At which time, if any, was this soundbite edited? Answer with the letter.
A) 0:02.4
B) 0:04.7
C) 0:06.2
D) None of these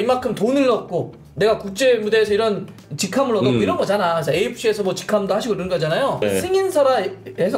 C